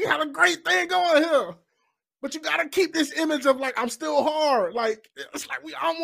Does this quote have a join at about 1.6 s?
no; 0 cuts

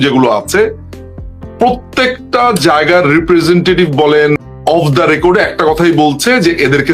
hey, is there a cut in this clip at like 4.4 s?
yes; 1 cut; at 4.4 s

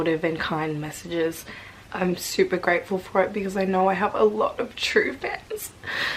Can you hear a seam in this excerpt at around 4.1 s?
no; 0 cuts

